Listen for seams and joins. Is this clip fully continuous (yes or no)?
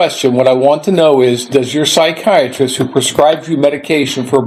yes